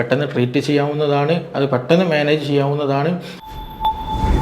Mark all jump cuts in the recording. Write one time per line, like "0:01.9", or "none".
0:03.3